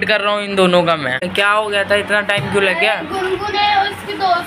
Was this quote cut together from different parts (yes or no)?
yes